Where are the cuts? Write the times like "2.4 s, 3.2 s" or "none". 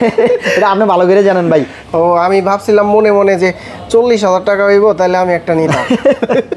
1.8 s